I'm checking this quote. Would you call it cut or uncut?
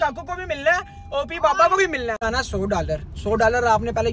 cut